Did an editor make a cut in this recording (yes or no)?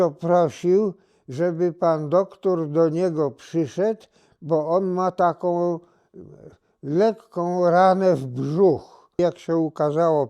yes